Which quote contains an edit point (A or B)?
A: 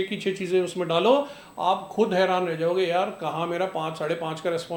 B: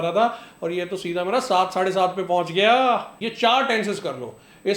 B